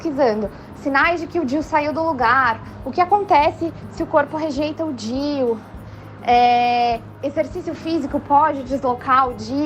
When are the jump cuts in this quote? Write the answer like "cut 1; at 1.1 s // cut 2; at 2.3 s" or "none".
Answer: none

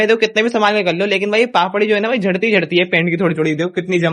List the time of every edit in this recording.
none

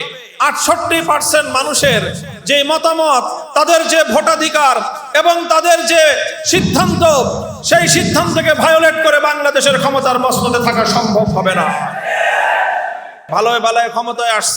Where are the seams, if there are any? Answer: cut 1; at 13.2 s

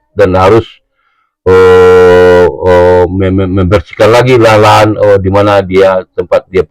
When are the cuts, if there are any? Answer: none

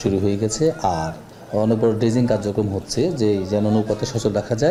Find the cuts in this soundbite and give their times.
none

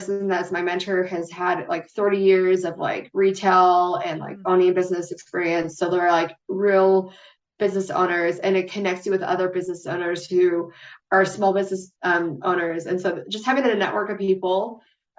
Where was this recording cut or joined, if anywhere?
none

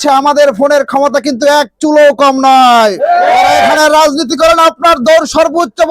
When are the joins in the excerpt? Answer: cut 1; at 3.7 s

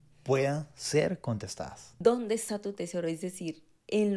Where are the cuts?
cut 1; at 1.8 s

